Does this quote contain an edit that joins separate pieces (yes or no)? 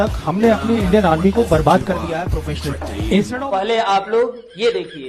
yes